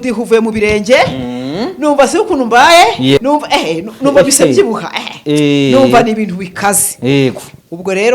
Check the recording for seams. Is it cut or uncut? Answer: cut